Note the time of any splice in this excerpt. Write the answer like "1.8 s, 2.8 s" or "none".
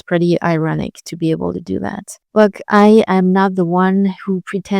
2.1 s

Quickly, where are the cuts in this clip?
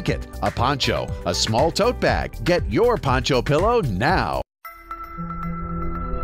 2.3 s, 4.4 s

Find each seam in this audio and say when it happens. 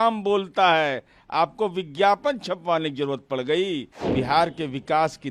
4.0 s

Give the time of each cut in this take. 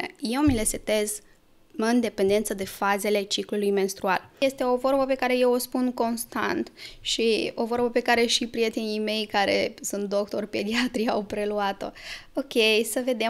4.4 s

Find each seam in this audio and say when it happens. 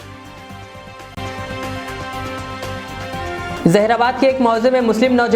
1.1 s, 3.4 s

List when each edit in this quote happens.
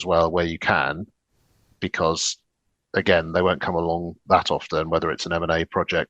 none

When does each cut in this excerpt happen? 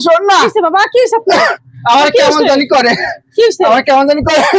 none

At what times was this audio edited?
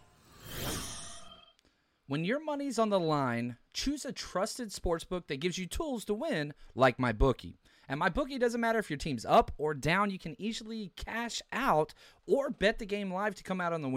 1.2 s

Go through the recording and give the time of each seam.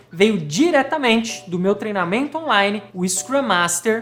none

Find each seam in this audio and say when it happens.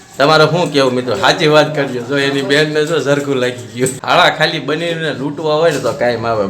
4.0 s

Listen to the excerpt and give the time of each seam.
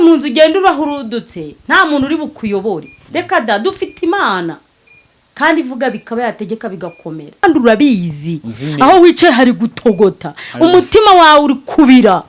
7.4 s

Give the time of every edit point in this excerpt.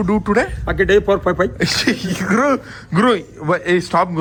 none

